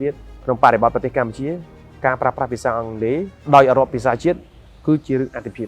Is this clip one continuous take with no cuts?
no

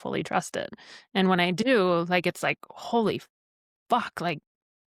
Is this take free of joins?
yes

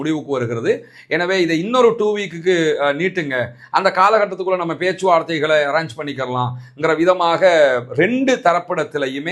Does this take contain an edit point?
no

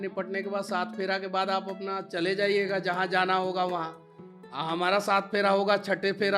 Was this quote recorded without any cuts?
yes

